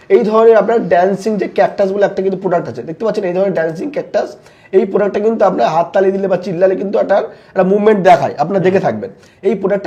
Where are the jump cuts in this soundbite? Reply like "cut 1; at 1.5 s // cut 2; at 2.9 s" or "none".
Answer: none